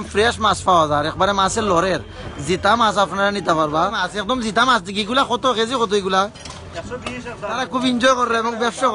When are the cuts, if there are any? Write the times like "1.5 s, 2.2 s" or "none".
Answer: 4.1 s, 7.6 s